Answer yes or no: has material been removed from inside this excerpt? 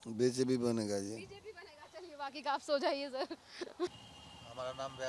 no